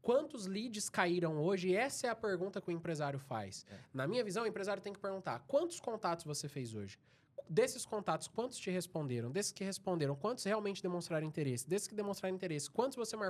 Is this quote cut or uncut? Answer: uncut